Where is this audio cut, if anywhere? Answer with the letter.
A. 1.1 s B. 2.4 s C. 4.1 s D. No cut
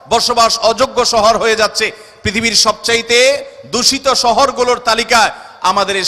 D